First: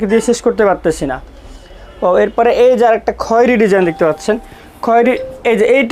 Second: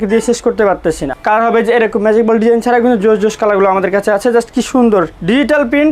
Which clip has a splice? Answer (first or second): second